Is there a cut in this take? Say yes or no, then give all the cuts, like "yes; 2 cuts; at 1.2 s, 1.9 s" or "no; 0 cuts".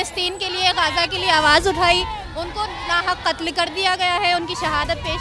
no; 0 cuts